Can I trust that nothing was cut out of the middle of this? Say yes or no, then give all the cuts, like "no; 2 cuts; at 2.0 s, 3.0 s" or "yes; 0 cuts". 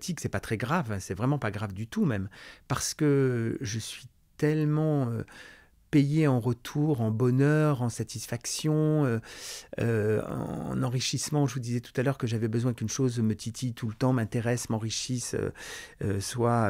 yes; 0 cuts